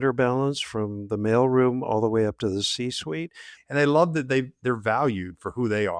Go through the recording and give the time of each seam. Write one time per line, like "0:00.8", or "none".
0:03.5